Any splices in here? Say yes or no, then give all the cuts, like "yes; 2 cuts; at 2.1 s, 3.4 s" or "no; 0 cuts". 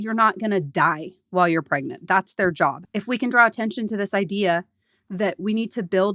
yes; 1 cut; at 2.8 s